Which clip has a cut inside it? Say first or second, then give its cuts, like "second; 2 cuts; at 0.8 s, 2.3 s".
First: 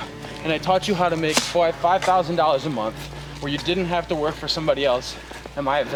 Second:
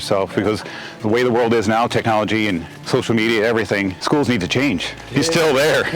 second; 4 cuts; at 0.9 s, 2.7 s, 4.0 s, 5.0 s